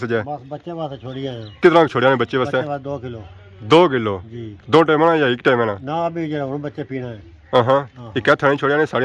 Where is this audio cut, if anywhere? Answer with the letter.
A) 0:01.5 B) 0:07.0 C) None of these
C